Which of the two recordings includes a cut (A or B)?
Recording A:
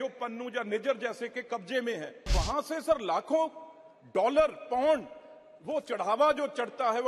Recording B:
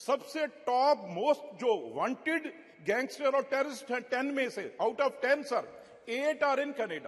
A